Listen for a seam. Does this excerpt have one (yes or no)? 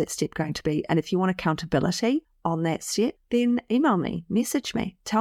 no